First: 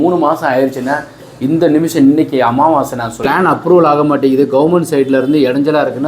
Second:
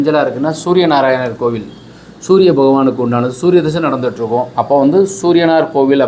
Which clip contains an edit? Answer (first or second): first